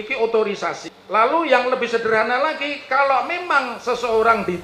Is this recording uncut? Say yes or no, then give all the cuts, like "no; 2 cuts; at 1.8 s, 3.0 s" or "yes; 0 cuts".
no; 1 cut; at 0.9 s